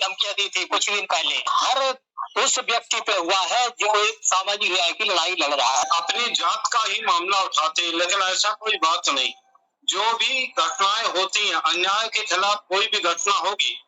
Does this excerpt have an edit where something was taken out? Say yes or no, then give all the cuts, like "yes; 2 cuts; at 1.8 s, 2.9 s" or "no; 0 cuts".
yes; 2 cuts; at 1.5 s, 5.8 s